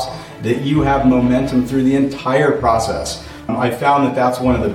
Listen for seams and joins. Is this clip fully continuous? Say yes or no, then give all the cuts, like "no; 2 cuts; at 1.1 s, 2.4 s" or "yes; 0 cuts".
no; 1 cut; at 3.5 s